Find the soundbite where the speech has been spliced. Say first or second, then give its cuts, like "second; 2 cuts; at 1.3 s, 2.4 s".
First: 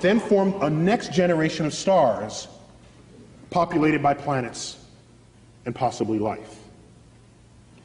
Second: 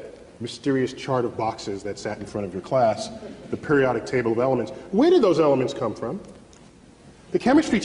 second; 1 cut; at 1.3 s